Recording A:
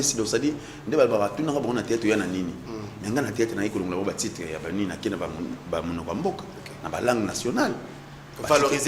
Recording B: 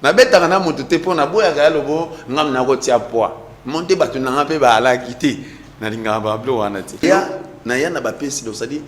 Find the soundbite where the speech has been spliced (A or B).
B